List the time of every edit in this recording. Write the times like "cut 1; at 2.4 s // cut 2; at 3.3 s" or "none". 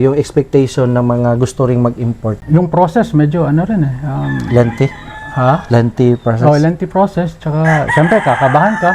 cut 1; at 2.5 s